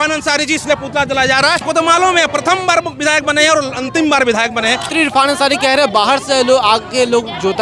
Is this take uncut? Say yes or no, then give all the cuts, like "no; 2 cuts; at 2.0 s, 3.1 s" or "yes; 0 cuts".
no; 2 cuts; at 1.6 s, 4.8 s